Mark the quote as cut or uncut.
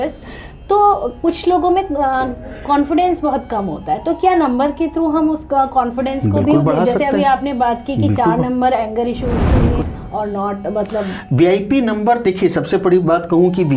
cut